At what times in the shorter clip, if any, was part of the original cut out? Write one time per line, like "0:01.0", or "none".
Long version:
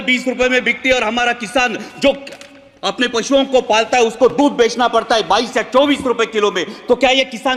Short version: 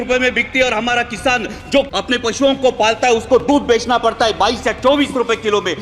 0:01.9